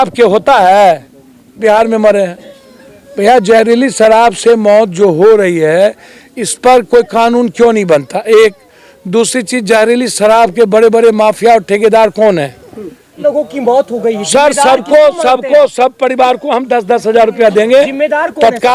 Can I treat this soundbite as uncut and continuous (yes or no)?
no